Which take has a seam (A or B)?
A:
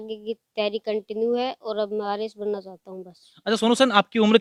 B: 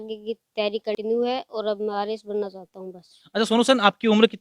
B